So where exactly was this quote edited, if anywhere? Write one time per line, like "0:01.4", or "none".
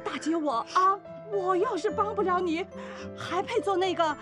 0:01.1